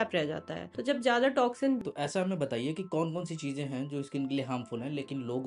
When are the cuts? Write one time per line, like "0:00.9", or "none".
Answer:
0:01.8